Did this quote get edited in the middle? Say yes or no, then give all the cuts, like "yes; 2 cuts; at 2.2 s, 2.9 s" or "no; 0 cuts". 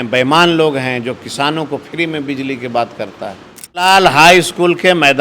yes; 1 cut; at 3.8 s